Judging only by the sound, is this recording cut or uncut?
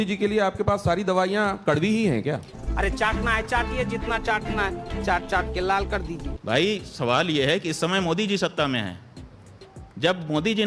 uncut